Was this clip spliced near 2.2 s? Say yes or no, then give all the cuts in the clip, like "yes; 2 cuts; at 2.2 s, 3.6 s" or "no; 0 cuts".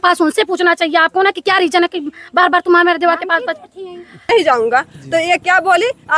no; 1 cut; at 4.3 s